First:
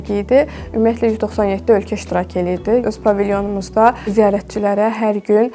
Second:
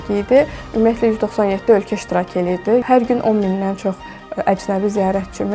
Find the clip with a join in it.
second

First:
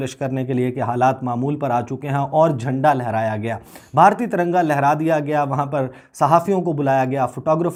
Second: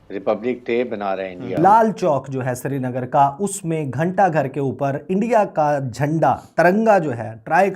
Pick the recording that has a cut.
second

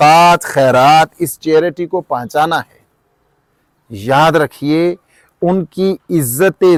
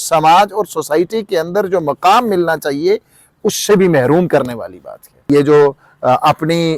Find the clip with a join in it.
second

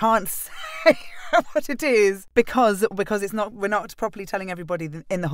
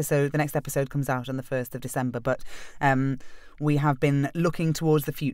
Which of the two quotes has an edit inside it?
first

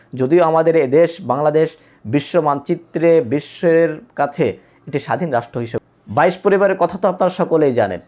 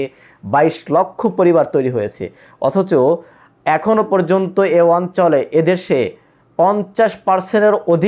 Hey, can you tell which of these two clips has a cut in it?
first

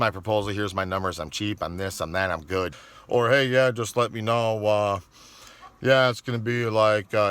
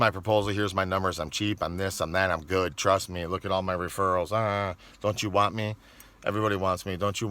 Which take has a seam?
first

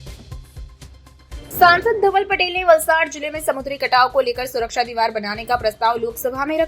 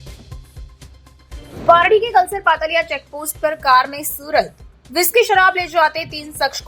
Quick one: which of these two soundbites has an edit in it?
second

